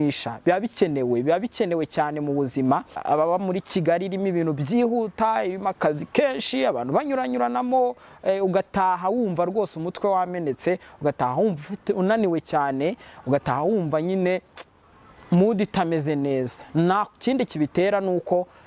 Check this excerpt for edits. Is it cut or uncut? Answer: cut